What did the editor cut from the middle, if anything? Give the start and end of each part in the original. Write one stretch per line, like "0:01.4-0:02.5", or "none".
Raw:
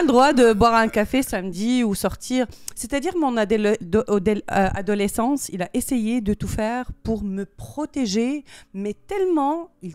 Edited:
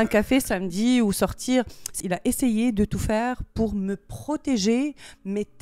0:02.8-0:05.5